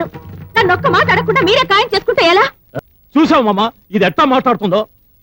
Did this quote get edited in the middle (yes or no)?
yes